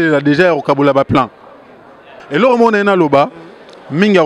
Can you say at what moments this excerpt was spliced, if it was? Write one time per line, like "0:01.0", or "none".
0:02.2